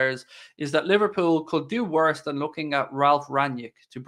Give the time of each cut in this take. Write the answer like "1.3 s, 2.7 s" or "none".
none